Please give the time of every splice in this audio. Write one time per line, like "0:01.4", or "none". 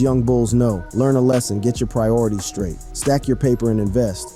none